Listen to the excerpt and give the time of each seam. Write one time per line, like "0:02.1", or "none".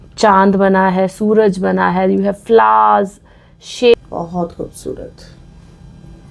0:03.9